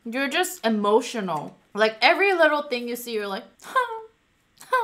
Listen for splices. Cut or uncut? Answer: cut